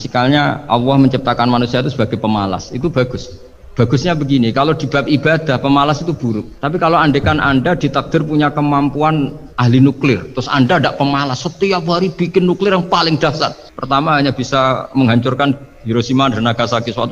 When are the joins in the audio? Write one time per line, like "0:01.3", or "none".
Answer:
0:09.4